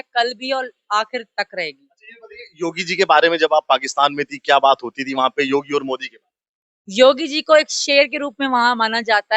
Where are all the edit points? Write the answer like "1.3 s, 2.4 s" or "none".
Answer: none

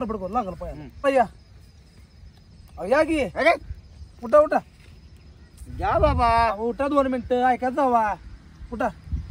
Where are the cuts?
1.0 s

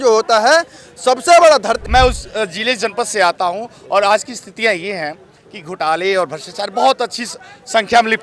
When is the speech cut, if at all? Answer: 1.8 s

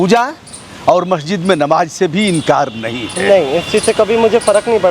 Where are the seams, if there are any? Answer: none

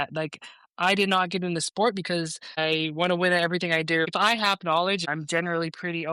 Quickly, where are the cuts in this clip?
2.6 s, 4.1 s, 5.1 s

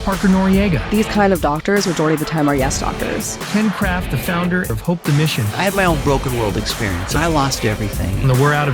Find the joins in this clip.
none

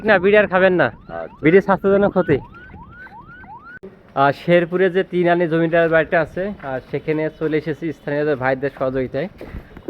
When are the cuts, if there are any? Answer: 3.7 s

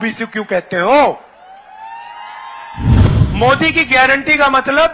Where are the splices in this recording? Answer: 3.0 s

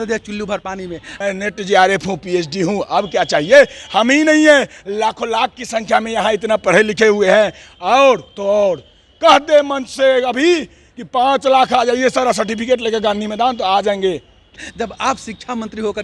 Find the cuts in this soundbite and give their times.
1.0 s, 14.4 s

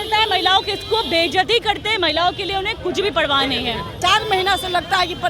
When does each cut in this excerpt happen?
4.0 s

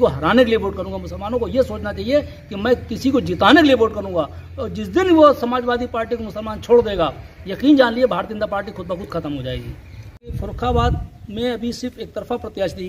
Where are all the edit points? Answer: 10.3 s

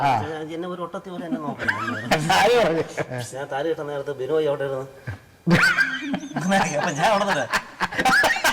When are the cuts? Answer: 3.2 s

